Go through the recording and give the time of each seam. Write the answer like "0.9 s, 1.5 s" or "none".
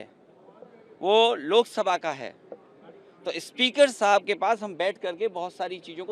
none